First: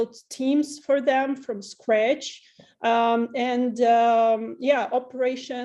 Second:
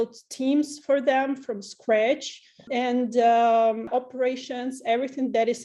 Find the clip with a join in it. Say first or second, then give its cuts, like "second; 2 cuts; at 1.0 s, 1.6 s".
second; 2 cuts; at 2.7 s, 3.9 s